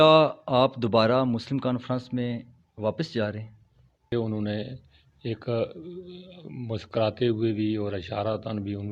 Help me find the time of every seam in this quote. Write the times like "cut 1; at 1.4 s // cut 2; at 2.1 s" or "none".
cut 1; at 4.1 s